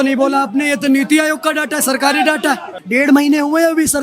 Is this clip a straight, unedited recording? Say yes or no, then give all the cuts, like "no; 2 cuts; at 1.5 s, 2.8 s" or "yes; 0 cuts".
no; 1 cut; at 2.8 s